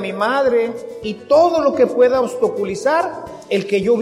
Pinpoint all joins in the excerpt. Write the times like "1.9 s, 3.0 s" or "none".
none